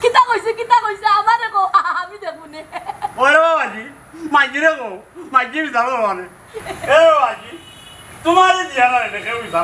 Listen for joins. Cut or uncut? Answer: uncut